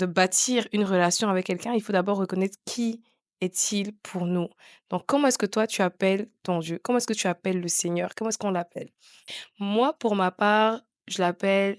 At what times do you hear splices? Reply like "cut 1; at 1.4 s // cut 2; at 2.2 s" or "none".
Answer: none